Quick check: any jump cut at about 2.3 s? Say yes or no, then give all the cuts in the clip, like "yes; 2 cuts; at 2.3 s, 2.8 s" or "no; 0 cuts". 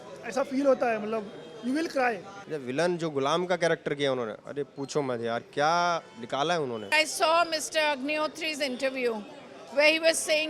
yes; 2 cuts; at 2.3 s, 6.9 s